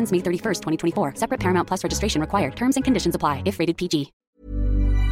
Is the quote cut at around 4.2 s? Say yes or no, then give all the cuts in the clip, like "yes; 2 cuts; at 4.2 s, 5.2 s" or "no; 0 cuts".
yes; 1 cut; at 4.2 s